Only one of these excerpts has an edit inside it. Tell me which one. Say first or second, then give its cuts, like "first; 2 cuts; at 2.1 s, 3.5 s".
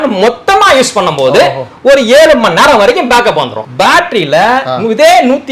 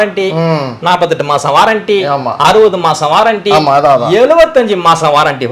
first; 1 cut; at 3.6 s